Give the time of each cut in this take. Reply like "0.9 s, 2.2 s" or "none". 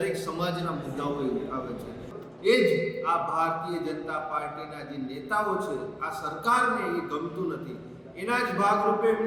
2.1 s